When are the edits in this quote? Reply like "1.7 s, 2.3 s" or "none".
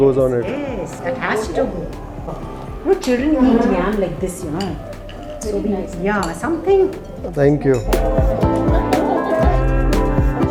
none